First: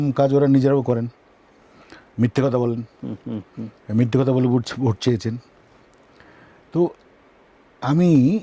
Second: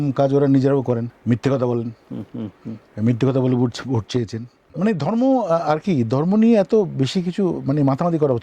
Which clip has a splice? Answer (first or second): second